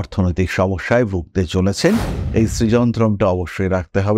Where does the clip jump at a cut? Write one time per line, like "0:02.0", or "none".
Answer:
0:02.2